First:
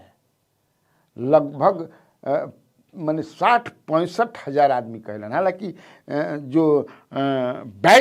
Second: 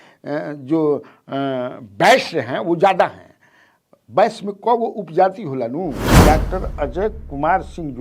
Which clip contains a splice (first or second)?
second